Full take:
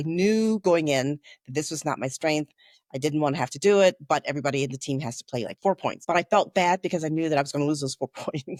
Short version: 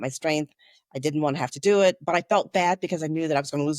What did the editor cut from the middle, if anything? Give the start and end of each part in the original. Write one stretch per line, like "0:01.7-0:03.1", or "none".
0:04.0-0:06.0